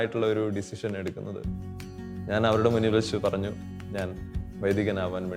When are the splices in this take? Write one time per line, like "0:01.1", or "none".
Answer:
none